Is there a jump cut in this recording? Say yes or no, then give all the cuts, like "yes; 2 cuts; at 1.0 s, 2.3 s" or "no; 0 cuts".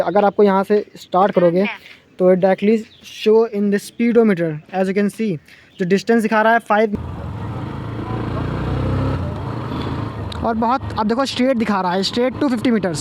yes; 1 cut; at 6.9 s